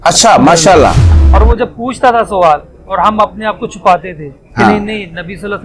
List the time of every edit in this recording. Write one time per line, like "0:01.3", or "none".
0:01.2